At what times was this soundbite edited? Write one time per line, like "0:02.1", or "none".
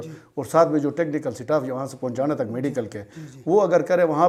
none